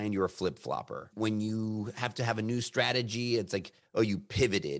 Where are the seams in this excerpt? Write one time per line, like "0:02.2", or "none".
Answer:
0:01.1